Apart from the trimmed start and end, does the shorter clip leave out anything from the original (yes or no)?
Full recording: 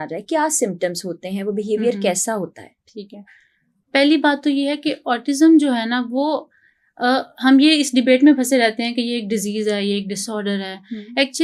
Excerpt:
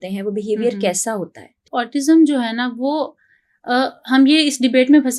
yes